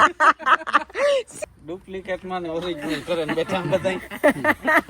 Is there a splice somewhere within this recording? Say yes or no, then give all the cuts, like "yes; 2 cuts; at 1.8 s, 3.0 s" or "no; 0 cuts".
yes; 1 cut; at 1.4 s